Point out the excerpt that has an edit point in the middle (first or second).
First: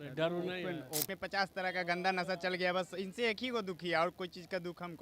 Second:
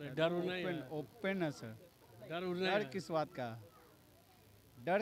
first